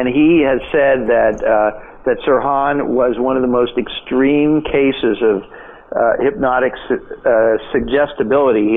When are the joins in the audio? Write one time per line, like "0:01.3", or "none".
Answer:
none